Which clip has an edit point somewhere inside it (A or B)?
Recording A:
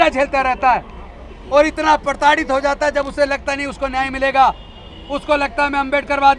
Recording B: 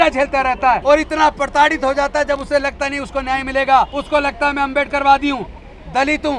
B